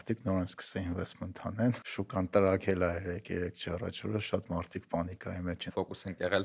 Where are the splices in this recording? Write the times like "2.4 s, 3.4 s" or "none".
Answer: 1.9 s, 5.7 s